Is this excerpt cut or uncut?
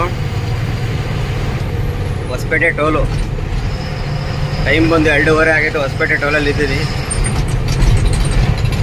uncut